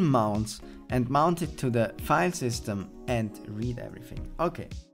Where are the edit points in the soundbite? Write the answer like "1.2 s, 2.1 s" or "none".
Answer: none